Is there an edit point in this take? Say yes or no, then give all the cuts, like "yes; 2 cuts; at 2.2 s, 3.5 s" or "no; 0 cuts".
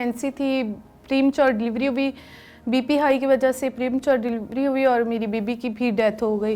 no; 0 cuts